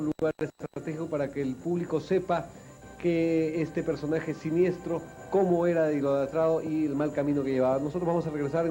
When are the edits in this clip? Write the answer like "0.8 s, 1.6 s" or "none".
none